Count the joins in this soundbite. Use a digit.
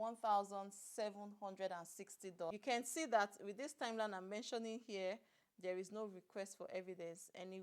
1